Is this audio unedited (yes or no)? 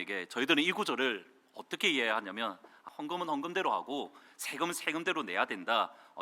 no